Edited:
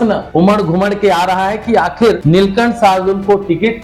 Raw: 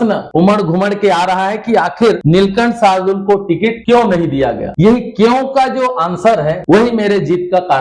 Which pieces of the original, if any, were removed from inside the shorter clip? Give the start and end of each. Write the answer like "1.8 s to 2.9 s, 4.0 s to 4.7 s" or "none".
none